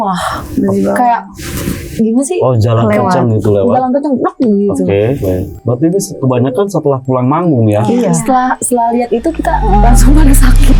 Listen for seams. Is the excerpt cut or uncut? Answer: uncut